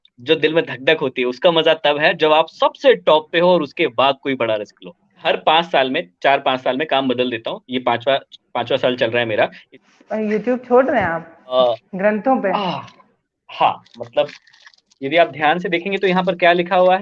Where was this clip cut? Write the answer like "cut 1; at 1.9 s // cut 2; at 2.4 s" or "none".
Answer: cut 1; at 5.2 s // cut 2; at 9.7 s // cut 3; at 11.6 s